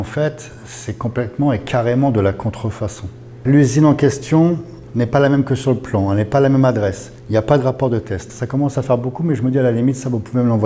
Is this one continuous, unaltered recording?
no; 1 cut; at 3.3 s

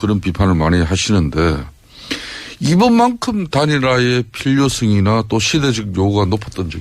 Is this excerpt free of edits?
no; 1 cut; at 1.3 s

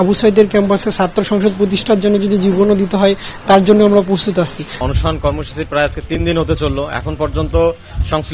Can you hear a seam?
no; 0 cuts

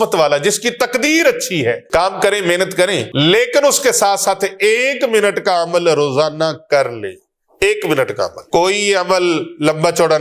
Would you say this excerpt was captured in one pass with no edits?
no; 3 cuts; at 1.8 s, 3.1 s, 8.4 s

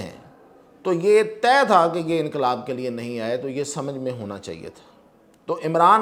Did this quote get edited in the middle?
no; 0 cuts

